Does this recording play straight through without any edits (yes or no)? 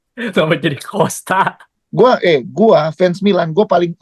no